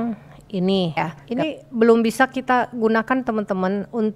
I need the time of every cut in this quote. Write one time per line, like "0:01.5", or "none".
0:01.1